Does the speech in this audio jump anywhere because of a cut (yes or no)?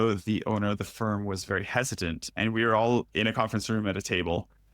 yes